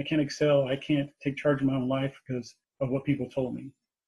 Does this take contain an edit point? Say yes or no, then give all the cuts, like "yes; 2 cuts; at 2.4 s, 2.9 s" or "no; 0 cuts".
yes; 1 cut; at 2.6 s